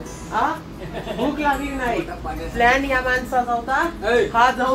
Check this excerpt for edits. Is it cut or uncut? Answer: uncut